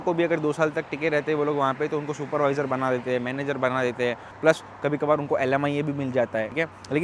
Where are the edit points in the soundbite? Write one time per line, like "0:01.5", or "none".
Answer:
none